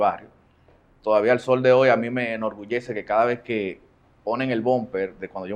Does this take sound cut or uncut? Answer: uncut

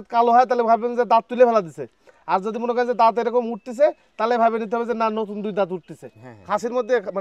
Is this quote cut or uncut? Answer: uncut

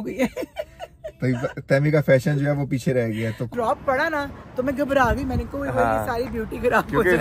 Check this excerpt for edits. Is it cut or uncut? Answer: cut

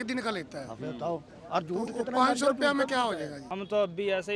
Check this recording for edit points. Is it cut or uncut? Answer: cut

